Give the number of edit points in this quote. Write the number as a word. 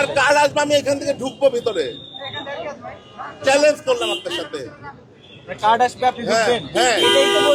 zero